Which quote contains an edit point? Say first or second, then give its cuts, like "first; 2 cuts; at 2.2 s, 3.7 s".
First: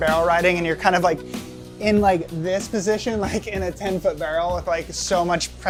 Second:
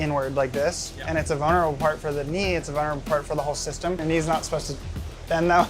second; 1 cut; at 4.0 s